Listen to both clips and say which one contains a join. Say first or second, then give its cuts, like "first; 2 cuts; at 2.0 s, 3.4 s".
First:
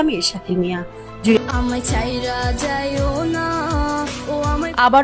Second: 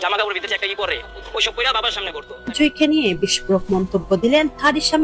first; 1 cut; at 1.4 s